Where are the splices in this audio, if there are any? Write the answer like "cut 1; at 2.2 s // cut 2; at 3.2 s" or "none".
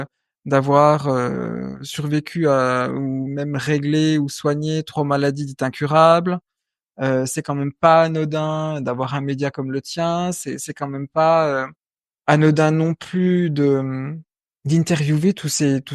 none